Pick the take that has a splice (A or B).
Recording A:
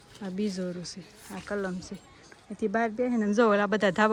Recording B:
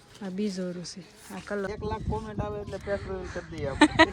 B